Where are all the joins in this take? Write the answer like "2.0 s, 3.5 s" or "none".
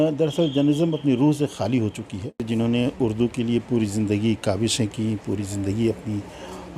2.4 s